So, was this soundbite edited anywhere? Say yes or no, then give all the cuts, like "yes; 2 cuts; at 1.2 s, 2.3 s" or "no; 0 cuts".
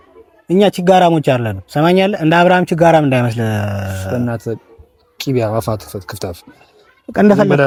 no; 0 cuts